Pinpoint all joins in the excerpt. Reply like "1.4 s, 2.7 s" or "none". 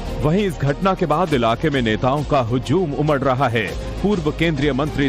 none